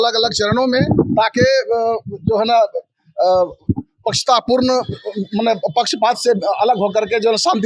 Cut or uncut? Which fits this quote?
uncut